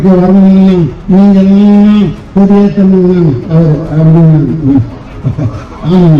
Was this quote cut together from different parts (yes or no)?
no